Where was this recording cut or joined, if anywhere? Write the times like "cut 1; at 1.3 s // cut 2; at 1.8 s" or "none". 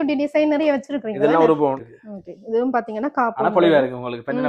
cut 1; at 1.9 s